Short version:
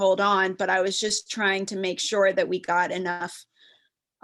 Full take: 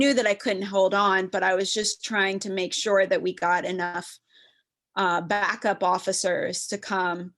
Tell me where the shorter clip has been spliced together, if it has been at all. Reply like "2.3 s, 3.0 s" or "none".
none